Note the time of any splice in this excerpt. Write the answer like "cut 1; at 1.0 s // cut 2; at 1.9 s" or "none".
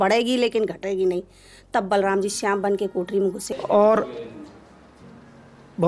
cut 1; at 3.5 s